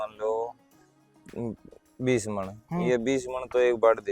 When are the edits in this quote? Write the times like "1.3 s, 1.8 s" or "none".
none